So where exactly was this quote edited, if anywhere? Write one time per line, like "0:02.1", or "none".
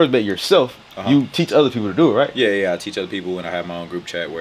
none